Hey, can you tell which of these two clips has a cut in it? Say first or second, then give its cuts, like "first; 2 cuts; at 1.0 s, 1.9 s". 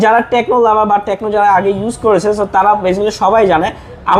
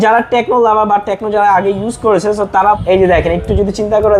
second; 1 cut; at 2.8 s